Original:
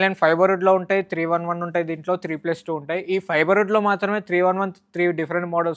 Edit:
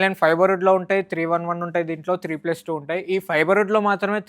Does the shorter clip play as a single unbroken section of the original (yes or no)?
yes